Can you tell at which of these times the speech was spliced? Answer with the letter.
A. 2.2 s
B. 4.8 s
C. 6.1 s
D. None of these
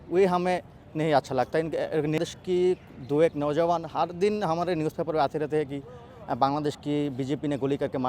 A